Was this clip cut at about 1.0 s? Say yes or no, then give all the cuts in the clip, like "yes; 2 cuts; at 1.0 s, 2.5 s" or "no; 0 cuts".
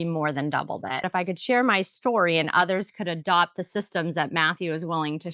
yes; 1 cut; at 1.0 s